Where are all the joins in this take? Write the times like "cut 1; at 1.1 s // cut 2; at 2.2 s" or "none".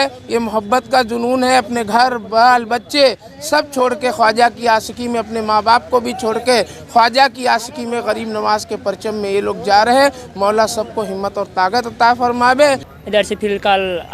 cut 1; at 12.9 s